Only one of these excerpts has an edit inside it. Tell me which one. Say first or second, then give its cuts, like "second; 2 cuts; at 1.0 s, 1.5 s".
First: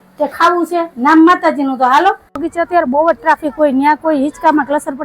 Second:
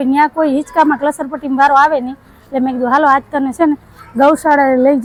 first; 1 cut; at 2.4 s